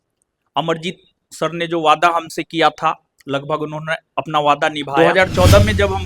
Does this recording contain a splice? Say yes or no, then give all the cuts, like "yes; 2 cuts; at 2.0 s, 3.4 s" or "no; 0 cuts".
yes; 1 cut; at 4.9 s